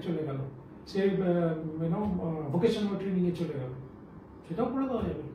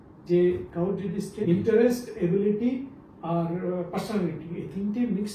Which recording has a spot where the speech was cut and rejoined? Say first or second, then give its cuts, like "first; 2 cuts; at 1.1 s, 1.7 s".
second; 1 cut; at 1.4 s